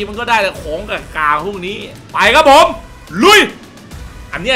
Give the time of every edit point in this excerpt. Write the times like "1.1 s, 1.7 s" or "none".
2.0 s